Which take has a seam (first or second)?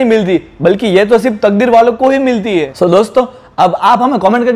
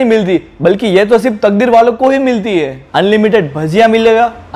second